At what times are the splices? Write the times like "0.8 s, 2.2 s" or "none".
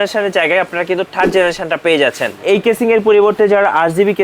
2.4 s